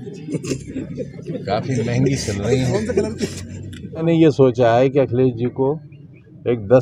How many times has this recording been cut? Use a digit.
1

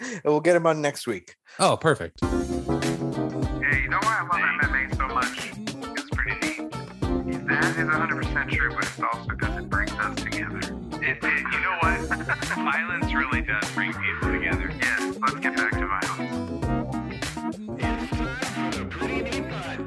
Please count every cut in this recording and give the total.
1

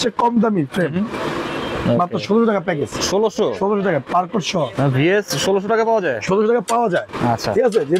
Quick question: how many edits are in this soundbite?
0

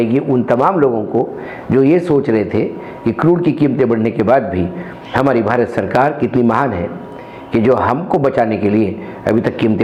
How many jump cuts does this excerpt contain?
0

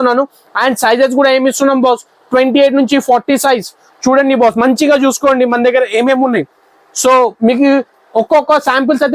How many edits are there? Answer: 0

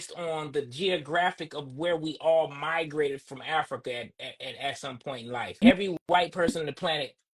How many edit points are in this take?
1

